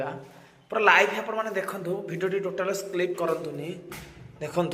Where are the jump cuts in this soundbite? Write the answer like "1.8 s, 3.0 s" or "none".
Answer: none

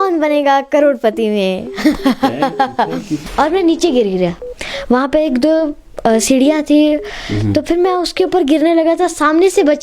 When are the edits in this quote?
3.2 s

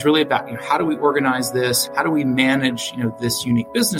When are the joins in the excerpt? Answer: 1.8 s

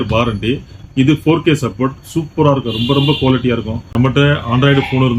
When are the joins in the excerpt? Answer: 3.8 s

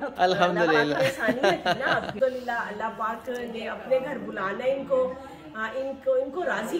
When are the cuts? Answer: 2.1 s

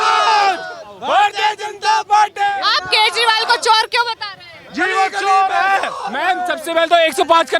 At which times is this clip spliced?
none

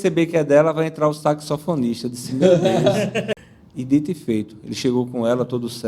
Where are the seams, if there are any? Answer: 3.3 s

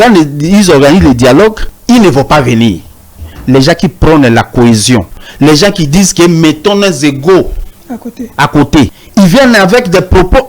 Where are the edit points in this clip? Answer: 1.7 s, 5.2 s, 9.0 s

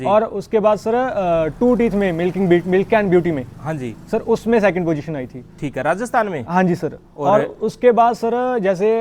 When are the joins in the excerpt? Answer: none

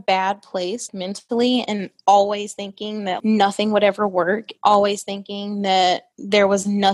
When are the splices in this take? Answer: none

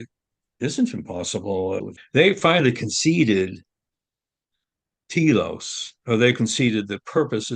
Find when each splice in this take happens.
1.9 s

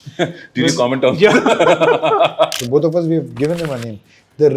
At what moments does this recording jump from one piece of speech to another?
2.6 s

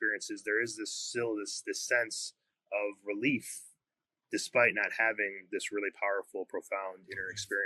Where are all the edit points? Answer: none

